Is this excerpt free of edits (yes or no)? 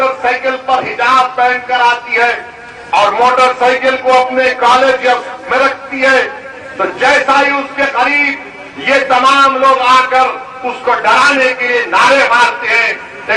yes